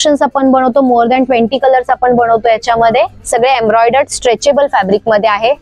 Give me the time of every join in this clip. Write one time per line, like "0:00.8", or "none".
none